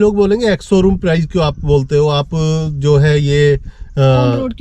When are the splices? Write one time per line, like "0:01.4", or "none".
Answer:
none

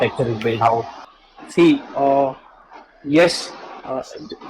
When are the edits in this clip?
0:01.0

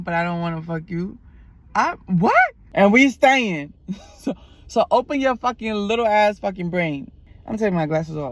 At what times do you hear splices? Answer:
0:02.6
0:07.3

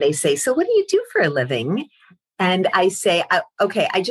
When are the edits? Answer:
none

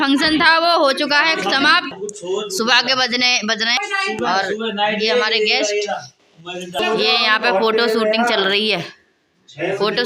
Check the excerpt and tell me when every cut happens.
0:01.9
0:03.8
0:06.8

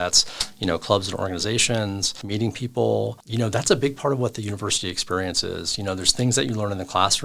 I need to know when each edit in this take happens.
0:02.2
0:03.2

